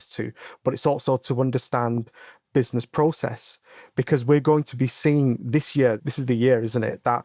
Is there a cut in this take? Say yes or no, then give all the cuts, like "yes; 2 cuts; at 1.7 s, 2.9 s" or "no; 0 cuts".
yes; 1 cut; at 6.1 s